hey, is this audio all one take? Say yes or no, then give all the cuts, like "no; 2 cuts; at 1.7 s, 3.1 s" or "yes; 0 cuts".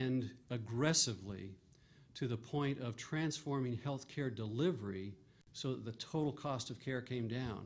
yes; 0 cuts